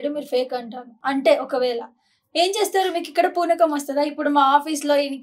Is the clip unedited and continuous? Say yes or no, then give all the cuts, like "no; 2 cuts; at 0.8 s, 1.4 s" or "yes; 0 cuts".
no; 1 cut; at 1.0 s